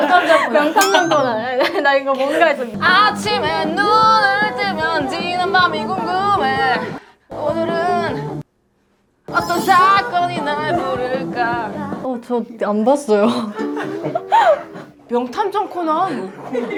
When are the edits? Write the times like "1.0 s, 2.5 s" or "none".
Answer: none